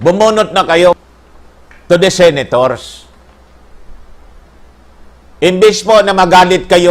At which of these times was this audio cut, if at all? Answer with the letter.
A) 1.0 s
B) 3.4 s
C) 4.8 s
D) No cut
A